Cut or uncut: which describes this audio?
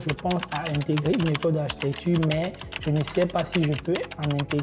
uncut